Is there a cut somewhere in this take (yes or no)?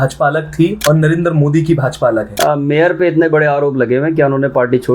yes